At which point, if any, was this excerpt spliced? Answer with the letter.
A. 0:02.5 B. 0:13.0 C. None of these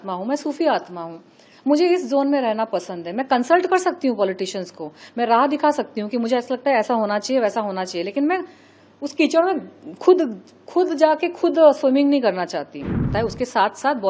B